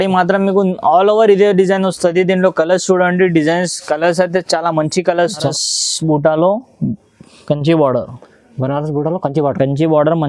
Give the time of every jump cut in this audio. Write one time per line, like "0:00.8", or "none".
0:05.5